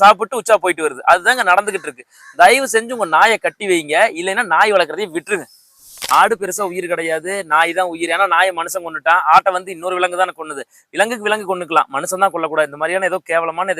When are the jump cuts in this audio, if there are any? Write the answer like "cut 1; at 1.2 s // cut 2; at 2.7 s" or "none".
cut 1; at 6.1 s